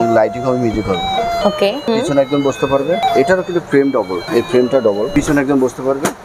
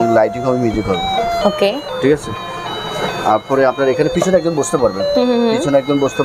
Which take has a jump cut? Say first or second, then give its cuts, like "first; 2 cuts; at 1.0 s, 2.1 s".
first; 4 cuts; at 1.9 s, 3.0 s, 4.2 s, 5.1 s